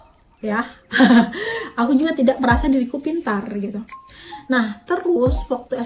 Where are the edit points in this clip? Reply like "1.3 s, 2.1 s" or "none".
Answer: none